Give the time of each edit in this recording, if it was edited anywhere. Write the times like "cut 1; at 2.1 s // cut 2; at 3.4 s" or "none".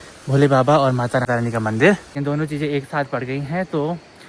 cut 1; at 2.1 s